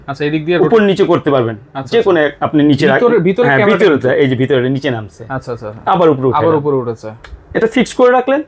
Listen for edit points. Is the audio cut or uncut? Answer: uncut